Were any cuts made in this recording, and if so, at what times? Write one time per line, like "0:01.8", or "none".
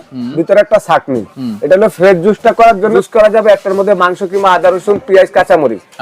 0:02.9